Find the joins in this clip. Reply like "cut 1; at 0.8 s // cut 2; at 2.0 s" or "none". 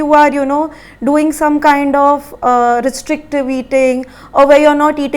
none